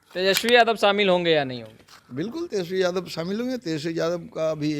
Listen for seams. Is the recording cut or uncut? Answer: uncut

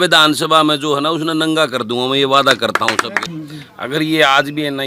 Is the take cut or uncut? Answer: cut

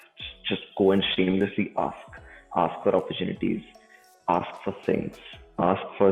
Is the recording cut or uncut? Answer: uncut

